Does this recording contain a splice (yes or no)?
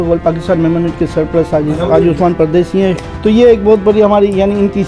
yes